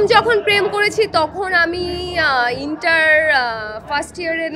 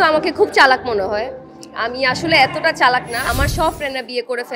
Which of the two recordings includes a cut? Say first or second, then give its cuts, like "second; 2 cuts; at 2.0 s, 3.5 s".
second; 1 cut; at 3.3 s